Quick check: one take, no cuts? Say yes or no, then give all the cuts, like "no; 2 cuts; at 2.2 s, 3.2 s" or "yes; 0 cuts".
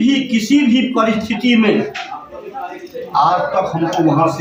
yes; 0 cuts